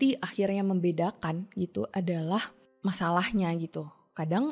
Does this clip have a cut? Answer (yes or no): yes